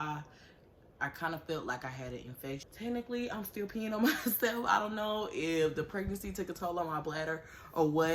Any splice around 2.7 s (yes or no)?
yes